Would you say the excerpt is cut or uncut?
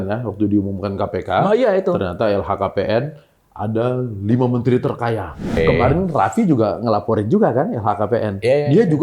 cut